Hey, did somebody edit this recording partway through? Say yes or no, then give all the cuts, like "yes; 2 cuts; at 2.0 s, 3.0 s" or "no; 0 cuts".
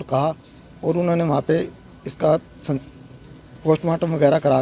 no; 0 cuts